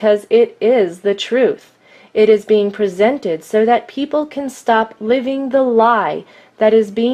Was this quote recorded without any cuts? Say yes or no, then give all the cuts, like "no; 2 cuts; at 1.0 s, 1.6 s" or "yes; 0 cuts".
no; 1 cut; at 1.2 s